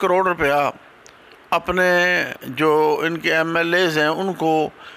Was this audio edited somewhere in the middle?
no; 0 cuts

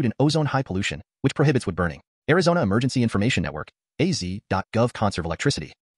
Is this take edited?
no; 0 cuts

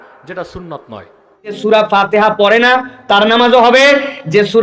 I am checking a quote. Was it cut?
yes; 1 cut; at 1.5 s

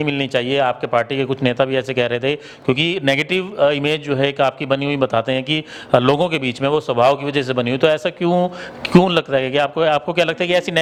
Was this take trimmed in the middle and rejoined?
no; 0 cuts

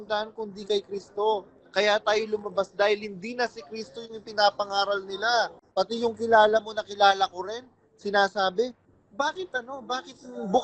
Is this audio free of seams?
no; 1 cut; at 5.6 s

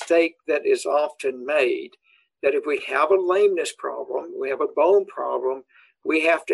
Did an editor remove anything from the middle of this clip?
no; 0 cuts

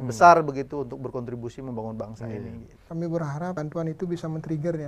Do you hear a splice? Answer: yes; 2 cuts; at 2.8 s, 3.6 s

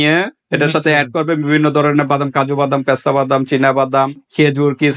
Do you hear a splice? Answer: no; 0 cuts

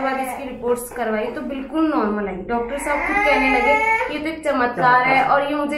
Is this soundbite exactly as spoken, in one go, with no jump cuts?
yes; 0 cuts

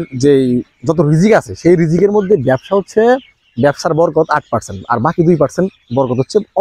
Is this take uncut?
yes; 0 cuts

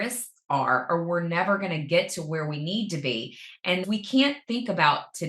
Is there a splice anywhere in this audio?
yes; 1 cut; at 3.8 s

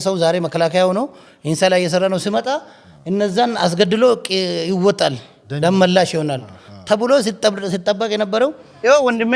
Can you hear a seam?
no; 0 cuts

